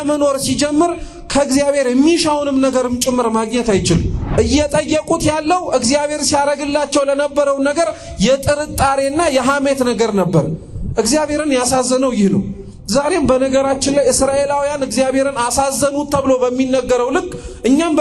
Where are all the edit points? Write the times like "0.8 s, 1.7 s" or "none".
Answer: 4.2 s